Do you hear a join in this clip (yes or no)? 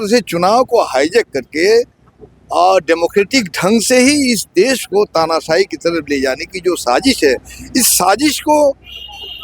no